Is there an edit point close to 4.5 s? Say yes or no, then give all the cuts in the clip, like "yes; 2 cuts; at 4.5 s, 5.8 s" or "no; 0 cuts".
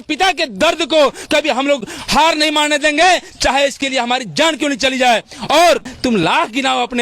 no; 1 cut; at 5.9 s